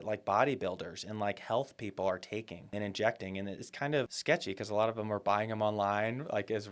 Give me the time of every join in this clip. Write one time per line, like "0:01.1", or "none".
0:02.7
0:04.1